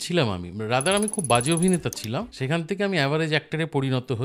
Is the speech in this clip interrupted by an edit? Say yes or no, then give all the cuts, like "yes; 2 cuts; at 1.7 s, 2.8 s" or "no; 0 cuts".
yes; 1 cut; at 2.3 s